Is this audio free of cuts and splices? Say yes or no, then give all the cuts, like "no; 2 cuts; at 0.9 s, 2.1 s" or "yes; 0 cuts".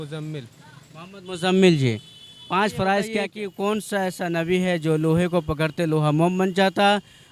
no; 1 cut; at 3.4 s